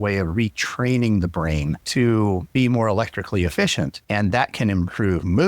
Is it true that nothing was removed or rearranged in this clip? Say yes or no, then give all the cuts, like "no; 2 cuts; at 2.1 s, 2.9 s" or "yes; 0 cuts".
no; 3 cuts; at 1.8 s, 2.5 s, 4.0 s